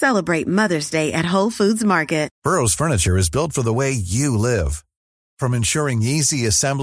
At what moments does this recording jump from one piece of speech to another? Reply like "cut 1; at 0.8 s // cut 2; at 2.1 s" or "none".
cut 1; at 2.3 s